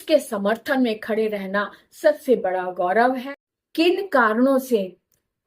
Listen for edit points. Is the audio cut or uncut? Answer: cut